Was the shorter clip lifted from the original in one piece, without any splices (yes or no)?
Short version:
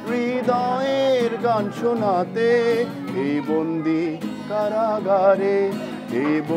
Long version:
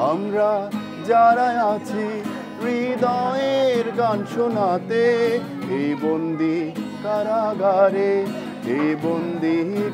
yes